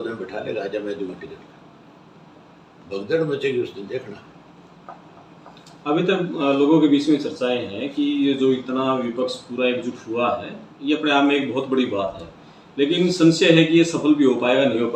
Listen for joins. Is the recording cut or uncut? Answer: uncut